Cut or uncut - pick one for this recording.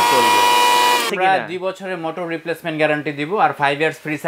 cut